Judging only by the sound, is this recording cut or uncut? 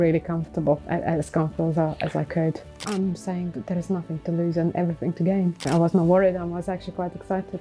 cut